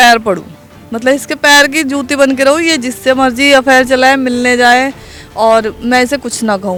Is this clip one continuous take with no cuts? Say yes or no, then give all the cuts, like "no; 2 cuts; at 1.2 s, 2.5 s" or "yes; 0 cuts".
yes; 0 cuts